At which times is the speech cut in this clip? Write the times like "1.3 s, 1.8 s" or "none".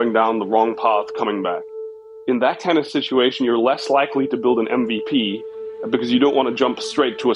2.0 s